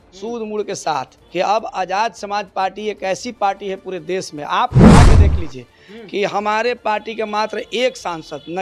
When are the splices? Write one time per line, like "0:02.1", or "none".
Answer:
0:01.2

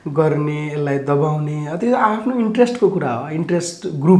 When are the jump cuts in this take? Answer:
none

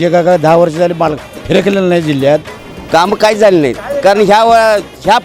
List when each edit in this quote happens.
0:02.6

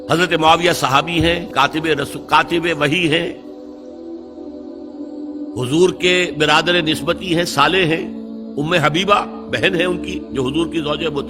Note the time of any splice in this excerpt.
0:01.5

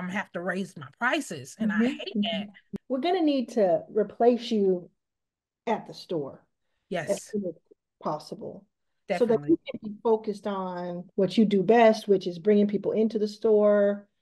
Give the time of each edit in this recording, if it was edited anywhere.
0:02.7

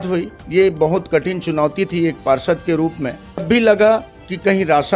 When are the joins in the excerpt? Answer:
0:03.4

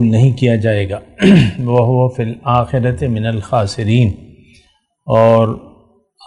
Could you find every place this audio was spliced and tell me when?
none

